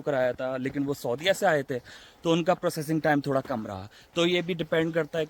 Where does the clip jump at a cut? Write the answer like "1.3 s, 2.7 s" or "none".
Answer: none